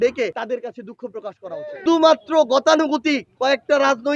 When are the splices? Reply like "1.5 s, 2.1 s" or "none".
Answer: 1.8 s

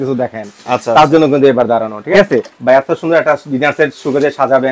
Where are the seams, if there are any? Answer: 2.0 s

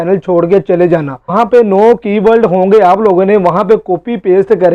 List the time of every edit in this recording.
1.3 s

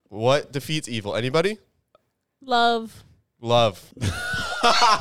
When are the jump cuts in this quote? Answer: 3.9 s

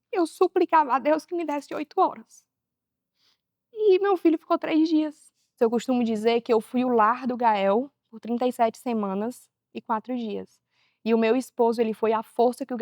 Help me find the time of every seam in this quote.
5.5 s

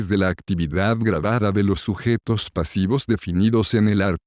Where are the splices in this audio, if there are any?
none

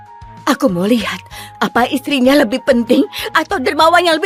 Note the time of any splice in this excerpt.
none

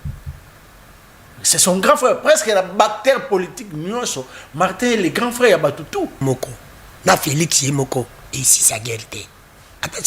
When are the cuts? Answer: 6.2 s

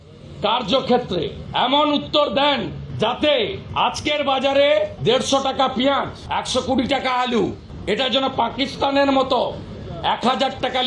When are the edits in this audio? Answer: 1.4 s, 2.8 s, 3.6 s, 4.9 s, 6.2 s, 7.7 s

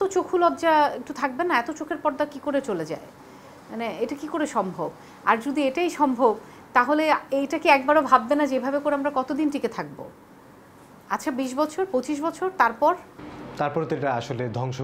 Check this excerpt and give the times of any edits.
none

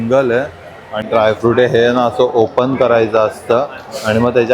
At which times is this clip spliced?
1.1 s

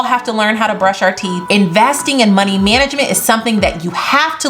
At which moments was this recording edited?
1.3 s

